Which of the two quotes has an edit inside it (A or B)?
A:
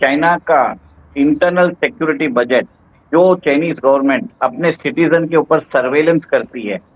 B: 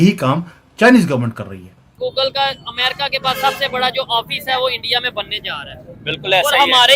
B